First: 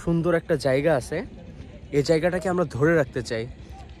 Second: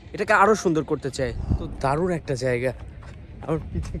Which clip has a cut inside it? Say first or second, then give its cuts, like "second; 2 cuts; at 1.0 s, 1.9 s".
second; 1 cut; at 1.7 s